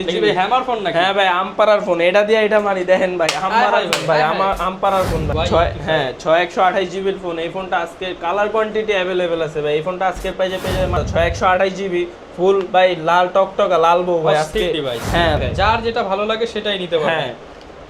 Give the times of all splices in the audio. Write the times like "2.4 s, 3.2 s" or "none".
5.2 s, 11.0 s, 15.4 s